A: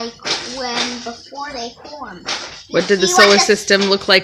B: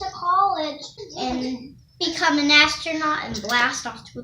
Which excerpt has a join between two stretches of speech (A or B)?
B